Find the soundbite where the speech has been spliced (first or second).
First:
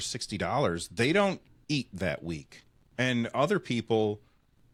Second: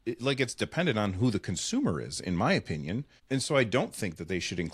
second